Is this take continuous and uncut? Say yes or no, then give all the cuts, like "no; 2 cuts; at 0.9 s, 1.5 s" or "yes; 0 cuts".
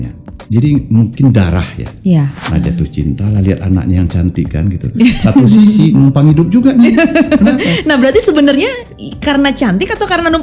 no; 1 cut; at 2.3 s